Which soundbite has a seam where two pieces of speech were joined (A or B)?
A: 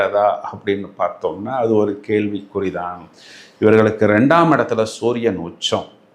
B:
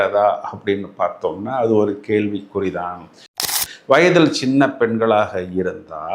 B